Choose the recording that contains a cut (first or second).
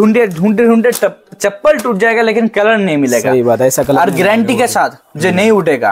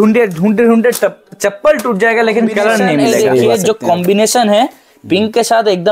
second